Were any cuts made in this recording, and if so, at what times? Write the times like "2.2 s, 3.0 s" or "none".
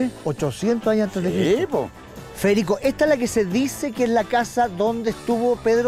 2.0 s